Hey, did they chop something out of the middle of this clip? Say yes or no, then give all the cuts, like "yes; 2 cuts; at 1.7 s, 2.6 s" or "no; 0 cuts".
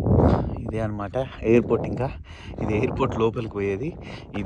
no; 0 cuts